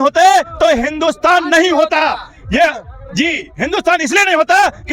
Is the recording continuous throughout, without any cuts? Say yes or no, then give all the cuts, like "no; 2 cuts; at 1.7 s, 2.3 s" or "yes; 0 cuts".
yes; 0 cuts